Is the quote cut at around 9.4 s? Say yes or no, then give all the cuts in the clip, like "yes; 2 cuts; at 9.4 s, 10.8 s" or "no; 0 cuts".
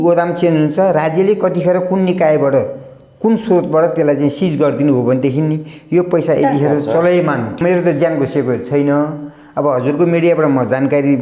no; 1 cut; at 7.6 s